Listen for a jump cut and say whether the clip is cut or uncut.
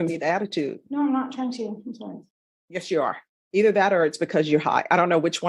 uncut